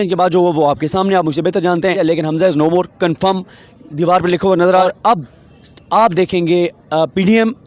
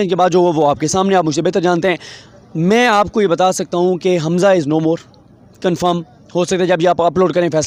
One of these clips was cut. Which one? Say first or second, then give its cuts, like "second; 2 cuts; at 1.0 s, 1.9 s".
first; 2 cuts; at 1.9 s, 4.8 s